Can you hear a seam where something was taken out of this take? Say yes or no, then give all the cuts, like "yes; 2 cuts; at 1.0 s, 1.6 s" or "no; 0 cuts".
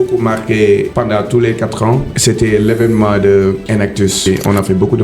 yes; 3 cuts; at 0.9 s, 2.1 s, 4.1 s